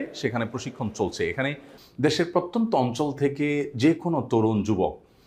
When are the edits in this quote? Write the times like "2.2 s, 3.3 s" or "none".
1.8 s